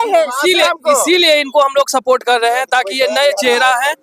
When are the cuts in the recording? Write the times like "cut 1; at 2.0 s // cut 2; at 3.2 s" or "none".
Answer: none